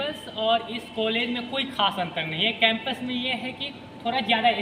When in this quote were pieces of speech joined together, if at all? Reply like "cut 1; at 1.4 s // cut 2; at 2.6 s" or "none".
none

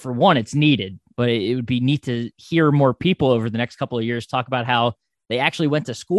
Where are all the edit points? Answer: cut 1; at 1.0 s

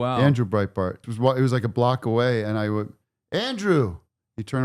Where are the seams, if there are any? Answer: cut 1; at 1.1 s

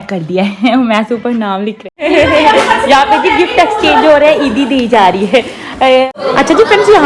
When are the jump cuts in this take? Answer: cut 1; at 2.1 s // cut 2; at 6.1 s

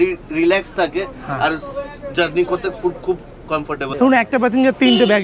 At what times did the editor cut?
cut 1; at 3.9 s

